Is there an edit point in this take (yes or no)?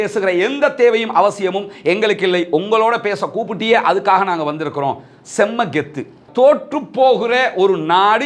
yes